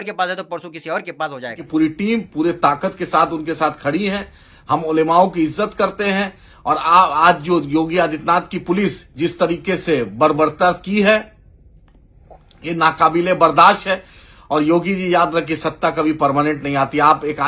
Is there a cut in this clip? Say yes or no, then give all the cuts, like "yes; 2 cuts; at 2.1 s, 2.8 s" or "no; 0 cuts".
yes; 1 cut; at 1.6 s